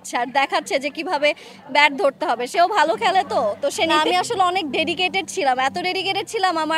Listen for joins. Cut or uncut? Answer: cut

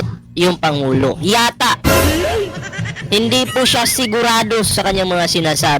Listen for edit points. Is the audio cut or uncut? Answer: cut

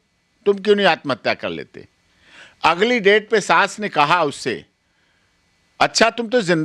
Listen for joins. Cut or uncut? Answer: uncut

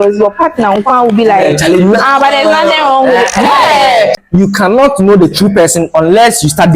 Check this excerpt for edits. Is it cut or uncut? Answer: cut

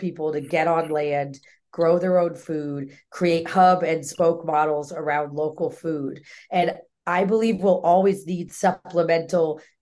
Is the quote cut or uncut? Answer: uncut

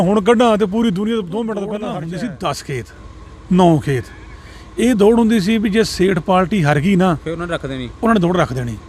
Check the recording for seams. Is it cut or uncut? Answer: cut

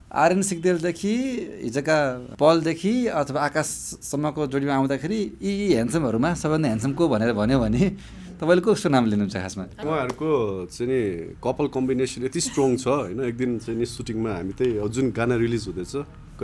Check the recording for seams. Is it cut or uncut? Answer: cut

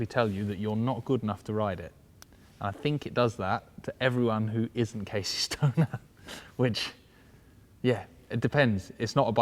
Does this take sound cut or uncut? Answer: uncut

